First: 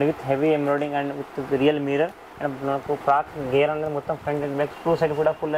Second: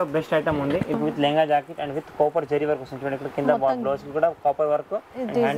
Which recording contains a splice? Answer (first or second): second